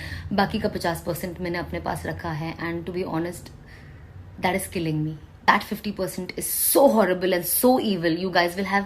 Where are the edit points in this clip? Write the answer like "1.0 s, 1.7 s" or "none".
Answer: 5.5 s